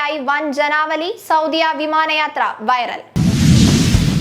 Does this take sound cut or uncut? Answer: cut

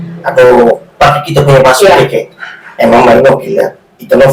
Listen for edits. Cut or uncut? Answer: uncut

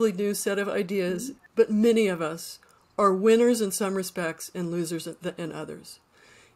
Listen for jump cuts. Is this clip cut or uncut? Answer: cut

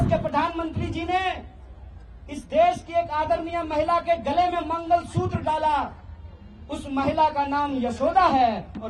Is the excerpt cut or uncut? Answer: uncut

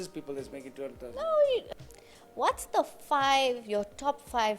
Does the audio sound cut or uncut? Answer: cut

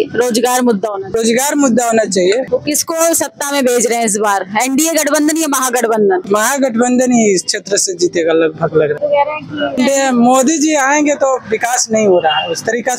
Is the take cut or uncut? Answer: cut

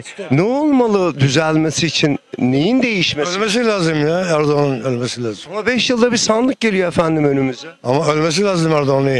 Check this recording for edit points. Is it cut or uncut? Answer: uncut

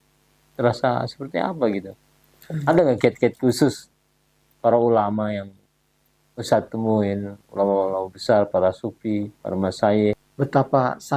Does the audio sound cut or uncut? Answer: cut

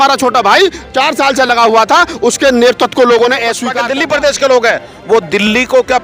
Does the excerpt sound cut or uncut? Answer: cut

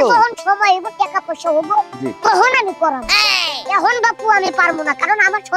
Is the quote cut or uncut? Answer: uncut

